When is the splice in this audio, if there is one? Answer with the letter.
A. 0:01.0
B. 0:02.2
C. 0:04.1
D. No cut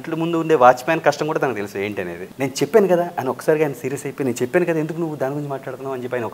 B